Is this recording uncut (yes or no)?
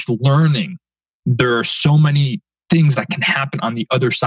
yes